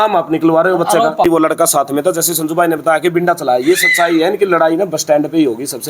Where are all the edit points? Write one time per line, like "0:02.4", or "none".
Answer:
0:01.2